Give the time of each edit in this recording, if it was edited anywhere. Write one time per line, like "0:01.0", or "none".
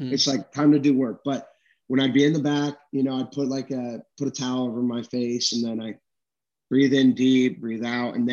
none